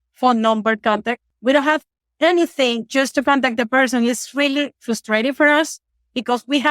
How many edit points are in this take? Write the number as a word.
one